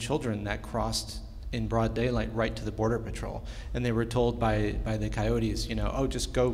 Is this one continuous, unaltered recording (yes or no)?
yes